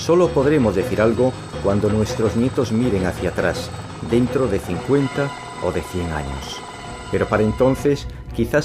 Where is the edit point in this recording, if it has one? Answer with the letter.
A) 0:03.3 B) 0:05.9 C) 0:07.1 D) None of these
C